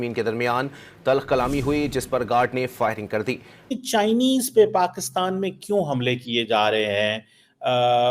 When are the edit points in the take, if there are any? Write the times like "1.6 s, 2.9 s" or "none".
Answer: 3.7 s